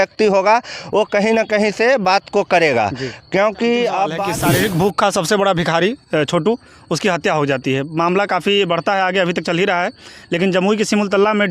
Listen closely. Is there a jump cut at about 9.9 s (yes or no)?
no